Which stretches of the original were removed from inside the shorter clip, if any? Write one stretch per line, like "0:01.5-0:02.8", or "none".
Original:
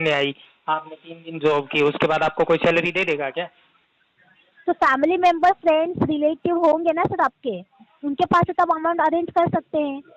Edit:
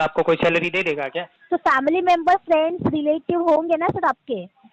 0:03.5-0:04.5